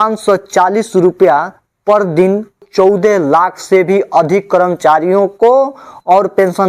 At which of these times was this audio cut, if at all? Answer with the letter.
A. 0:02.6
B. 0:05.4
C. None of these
A